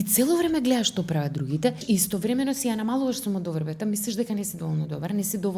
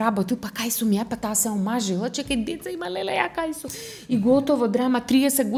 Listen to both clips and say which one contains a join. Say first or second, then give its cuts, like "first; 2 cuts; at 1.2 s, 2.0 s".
first; 1 cut; at 1.8 s